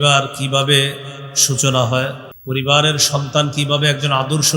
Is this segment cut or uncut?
cut